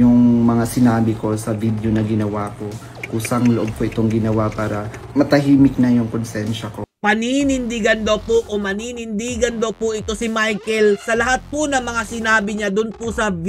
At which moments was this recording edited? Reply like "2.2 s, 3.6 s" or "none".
6.9 s